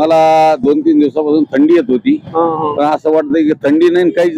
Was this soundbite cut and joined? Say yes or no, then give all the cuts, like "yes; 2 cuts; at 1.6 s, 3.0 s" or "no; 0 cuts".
no; 0 cuts